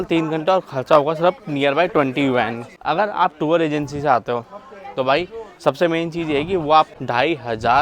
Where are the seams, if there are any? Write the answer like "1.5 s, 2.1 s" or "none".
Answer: 2.7 s, 6.9 s

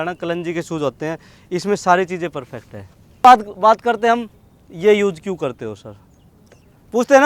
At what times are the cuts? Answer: 3.2 s

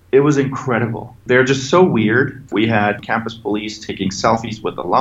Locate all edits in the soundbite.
1.2 s, 3.0 s

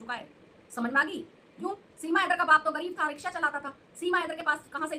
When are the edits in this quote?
1.4 s

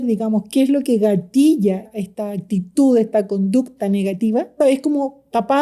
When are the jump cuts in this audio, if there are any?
1.9 s, 4.6 s

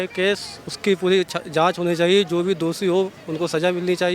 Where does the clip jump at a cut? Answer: none

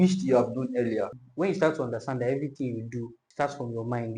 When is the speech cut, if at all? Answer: 1.2 s, 3.2 s

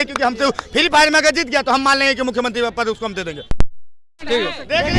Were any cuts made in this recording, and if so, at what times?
3.4 s

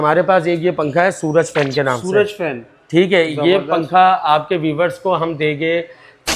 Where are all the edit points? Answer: none

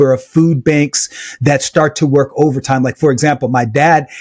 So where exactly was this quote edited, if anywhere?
none

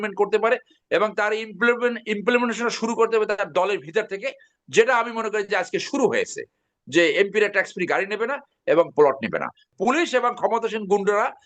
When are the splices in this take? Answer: 9.7 s

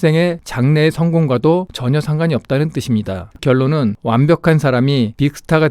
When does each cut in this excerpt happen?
3.4 s

